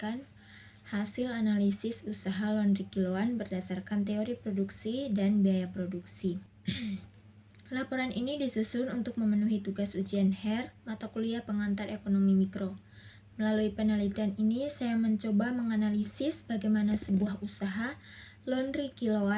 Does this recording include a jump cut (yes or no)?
yes